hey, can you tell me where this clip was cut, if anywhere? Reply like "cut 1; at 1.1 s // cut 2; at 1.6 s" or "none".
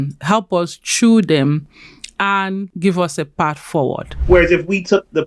cut 1; at 2.7 s // cut 2; at 4.2 s